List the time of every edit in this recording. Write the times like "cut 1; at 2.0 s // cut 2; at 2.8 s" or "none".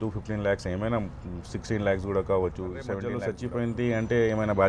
cut 1; at 3.2 s